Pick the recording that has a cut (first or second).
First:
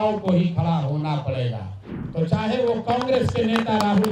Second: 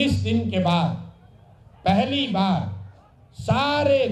first